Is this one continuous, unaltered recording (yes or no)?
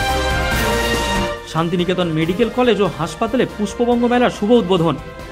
no